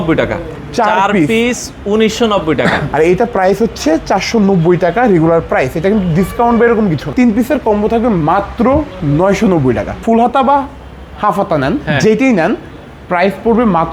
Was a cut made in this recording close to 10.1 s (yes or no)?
yes